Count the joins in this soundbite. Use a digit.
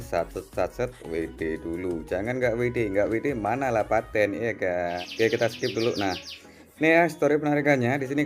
1